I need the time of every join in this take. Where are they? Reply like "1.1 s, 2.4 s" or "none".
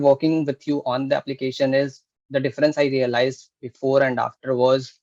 none